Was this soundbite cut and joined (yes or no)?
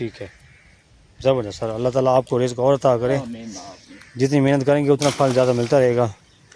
no